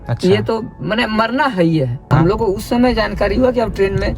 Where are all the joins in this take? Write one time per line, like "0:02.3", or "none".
0:02.1